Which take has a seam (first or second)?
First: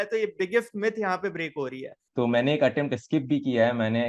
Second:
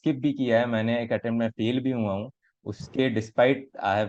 first